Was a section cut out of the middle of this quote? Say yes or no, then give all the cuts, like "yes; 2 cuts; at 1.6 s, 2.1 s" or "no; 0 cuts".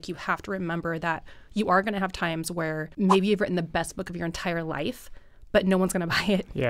yes; 1 cut; at 2.9 s